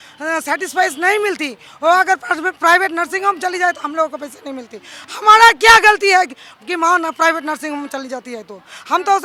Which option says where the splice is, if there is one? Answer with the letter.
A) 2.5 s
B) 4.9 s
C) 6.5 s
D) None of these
D